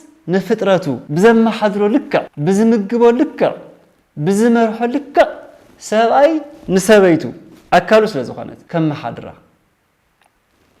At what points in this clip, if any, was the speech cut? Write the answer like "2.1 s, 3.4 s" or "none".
1.0 s, 2.3 s, 8.5 s